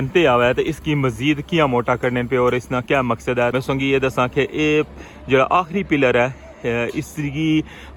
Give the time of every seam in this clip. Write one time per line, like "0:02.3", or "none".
none